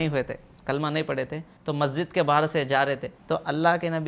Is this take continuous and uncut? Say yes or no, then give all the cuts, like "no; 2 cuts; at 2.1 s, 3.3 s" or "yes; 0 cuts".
no; 2 cuts; at 1.5 s, 3.1 s